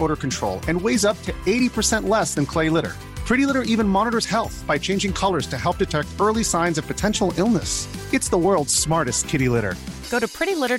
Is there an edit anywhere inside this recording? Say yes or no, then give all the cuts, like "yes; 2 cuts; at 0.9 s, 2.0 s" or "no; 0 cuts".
no; 0 cuts